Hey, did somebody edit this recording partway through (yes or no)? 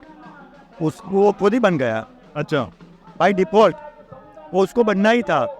no